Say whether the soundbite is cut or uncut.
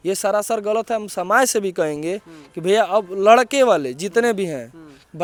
uncut